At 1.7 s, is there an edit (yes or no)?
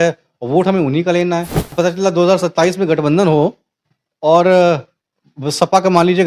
yes